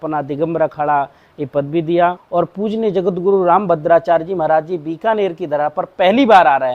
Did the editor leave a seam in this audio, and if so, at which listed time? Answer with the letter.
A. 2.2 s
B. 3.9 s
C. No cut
A